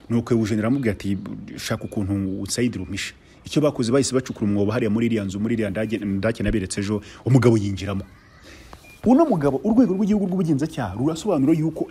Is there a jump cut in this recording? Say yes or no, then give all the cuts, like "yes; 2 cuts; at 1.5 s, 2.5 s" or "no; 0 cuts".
no; 0 cuts